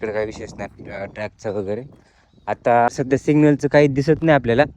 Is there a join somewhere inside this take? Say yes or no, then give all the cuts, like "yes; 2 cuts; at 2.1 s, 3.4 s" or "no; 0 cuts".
yes; 1 cut; at 2.9 s